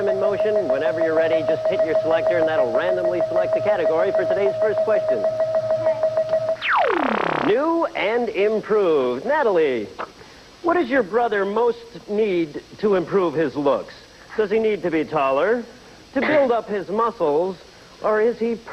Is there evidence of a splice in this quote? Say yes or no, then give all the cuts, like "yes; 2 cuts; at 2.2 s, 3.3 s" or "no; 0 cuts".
no; 0 cuts